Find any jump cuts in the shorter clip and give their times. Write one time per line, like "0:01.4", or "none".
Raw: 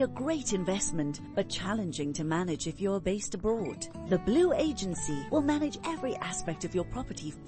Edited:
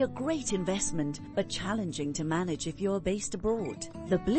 none